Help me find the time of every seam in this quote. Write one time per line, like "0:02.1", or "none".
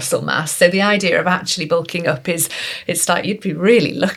none